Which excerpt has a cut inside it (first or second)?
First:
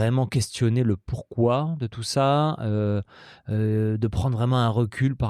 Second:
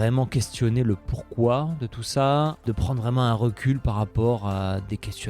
second